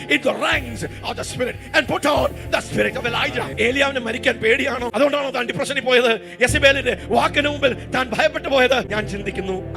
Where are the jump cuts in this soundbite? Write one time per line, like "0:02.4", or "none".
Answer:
0:03.5
0:04.9
0:08.9